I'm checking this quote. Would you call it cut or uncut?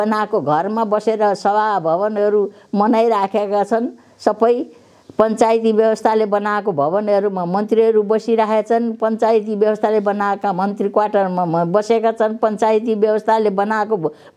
uncut